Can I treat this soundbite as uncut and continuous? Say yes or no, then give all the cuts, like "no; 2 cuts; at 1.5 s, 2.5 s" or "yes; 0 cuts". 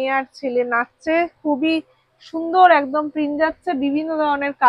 yes; 0 cuts